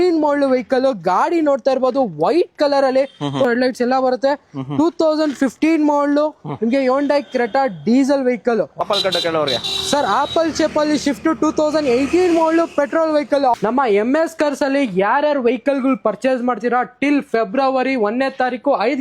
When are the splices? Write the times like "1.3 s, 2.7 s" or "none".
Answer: 3.4 s, 8.8 s, 13.5 s

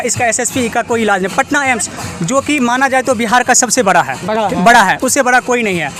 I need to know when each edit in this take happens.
none

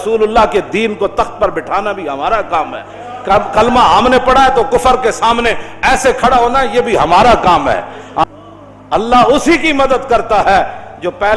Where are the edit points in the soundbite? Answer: 8.2 s

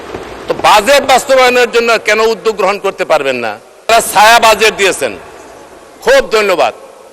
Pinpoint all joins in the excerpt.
3.9 s

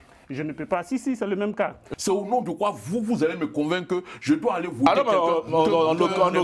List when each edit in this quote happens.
1.8 s

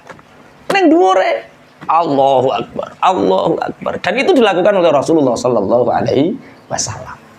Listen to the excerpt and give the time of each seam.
none

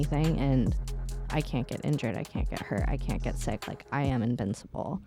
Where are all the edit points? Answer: none

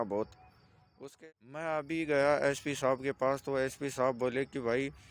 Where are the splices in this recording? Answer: 1.0 s

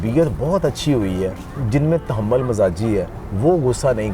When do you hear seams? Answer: 1.5 s, 3.2 s

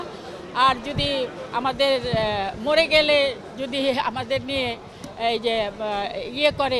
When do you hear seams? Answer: none

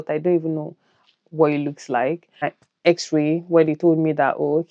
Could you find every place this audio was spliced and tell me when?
2.6 s

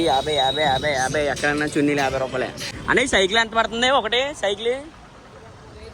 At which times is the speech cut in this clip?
2.7 s

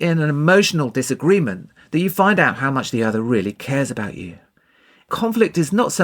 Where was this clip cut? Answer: 5.1 s

